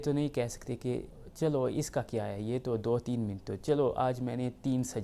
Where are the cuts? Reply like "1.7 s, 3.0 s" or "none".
1.2 s